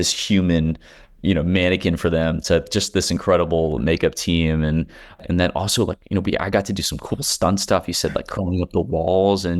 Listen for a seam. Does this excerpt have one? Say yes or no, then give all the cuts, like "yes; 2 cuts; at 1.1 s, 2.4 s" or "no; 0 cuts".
yes; 1 cut; at 5.2 s